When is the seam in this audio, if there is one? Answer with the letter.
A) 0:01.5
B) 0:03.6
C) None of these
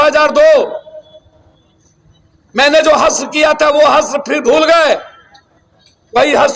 C